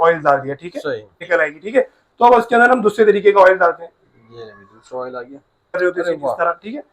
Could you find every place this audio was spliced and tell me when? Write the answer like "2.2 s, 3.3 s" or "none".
1.2 s, 5.8 s